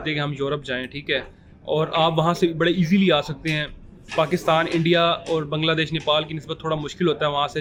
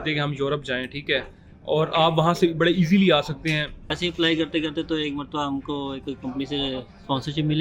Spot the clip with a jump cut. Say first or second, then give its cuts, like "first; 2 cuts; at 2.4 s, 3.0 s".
second; 1 cut; at 3.9 s